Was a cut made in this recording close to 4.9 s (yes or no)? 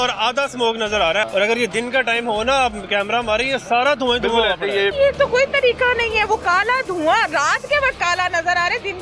yes